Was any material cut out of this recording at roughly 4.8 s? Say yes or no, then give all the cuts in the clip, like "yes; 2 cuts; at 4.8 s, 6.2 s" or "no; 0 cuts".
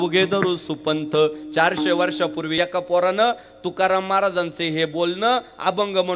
no; 1 cut; at 2.6 s